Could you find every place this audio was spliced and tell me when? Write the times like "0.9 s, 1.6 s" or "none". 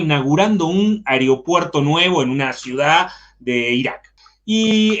4.1 s